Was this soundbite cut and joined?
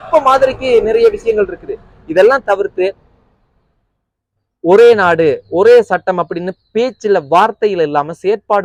no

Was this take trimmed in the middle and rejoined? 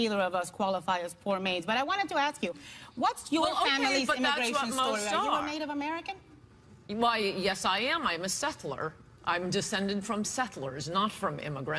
yes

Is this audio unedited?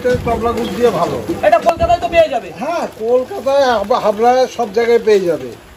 yes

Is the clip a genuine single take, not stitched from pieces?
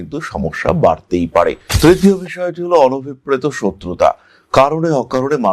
no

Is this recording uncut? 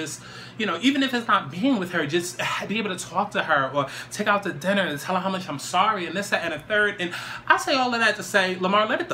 yes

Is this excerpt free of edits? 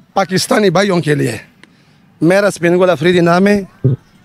yes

